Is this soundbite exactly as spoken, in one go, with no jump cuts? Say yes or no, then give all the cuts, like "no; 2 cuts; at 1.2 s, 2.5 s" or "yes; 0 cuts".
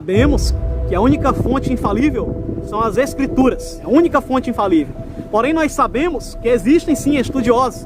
no; 1 cut; at 3.7 s